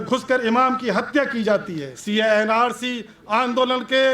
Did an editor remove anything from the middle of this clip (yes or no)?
yes